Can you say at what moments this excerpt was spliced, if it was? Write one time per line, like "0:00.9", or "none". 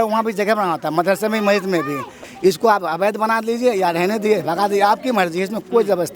0:02.2